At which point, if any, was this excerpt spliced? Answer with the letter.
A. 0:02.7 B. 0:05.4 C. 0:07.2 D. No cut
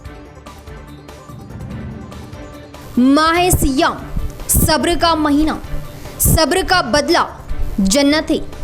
D